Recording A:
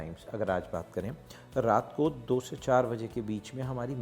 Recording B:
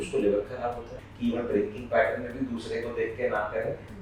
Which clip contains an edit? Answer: B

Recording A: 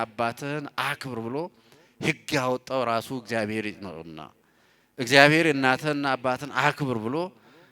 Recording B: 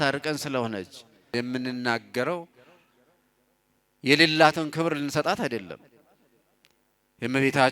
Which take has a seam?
B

